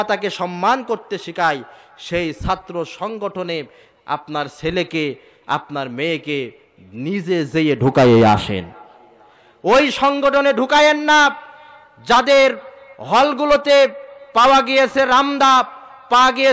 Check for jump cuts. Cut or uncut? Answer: uncut